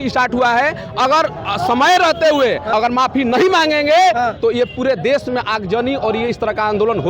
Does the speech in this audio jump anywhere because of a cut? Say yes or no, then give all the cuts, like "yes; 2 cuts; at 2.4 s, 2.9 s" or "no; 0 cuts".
yes; 1 cut; at 2.6 s